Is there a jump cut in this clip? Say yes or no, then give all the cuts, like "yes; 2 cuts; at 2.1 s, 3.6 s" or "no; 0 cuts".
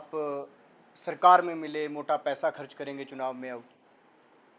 no; 0 cuts